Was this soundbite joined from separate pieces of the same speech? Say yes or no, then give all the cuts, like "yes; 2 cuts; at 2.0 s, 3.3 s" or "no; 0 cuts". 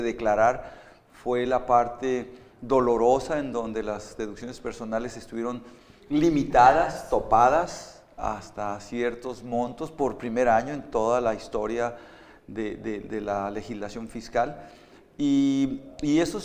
no; 0 cuts